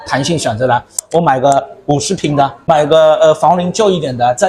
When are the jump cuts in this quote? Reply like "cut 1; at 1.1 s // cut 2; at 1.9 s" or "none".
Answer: cut 1; at 1.0 s // cut 2; at 2.6 s